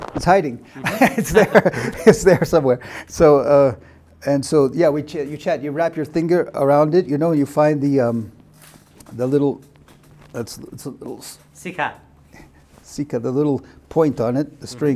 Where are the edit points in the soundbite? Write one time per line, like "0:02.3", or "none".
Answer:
none